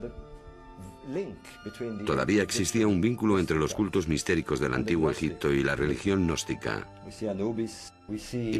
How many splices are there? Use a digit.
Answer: 1